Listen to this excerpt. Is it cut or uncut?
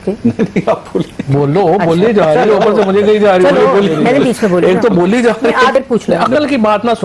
cut